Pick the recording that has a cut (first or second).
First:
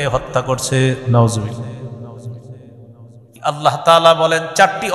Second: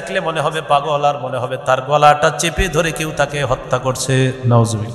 first